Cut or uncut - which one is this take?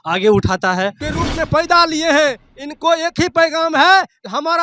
cut